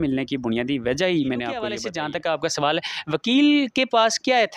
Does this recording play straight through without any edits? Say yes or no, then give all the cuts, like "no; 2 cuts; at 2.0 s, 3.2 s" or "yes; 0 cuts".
no; 1 cut; at 1.8 s